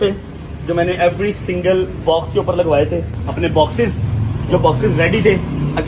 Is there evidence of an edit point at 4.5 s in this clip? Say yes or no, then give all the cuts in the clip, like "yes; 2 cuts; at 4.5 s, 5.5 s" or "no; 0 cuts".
no; 1 cut; at 3.2 s